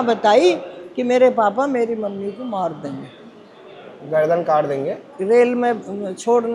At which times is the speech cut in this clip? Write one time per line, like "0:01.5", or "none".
none